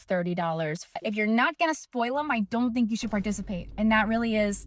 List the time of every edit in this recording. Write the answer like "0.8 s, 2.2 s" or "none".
0.9 s